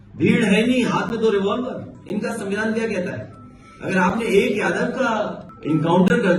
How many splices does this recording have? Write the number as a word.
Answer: two